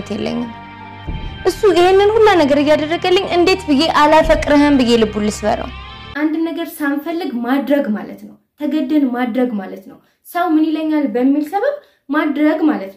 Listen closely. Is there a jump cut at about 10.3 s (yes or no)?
no